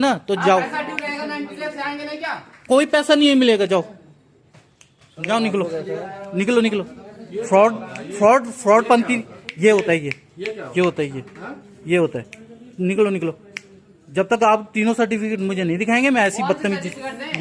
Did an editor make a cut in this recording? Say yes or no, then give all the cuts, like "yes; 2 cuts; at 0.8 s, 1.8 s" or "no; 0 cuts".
no; 0 cuts